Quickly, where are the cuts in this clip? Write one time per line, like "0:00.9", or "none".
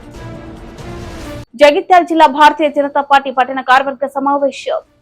0:01.4